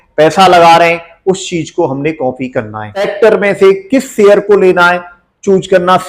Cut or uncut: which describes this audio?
cut